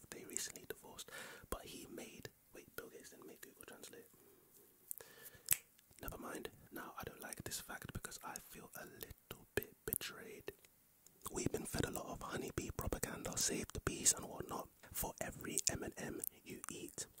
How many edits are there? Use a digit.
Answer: 2